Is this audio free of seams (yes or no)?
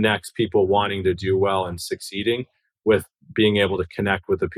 yes